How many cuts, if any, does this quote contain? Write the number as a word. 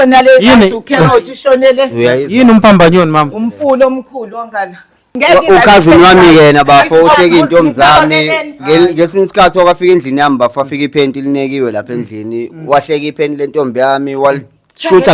one